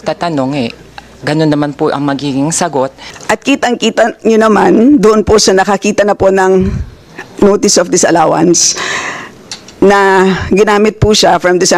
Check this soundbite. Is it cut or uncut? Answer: cut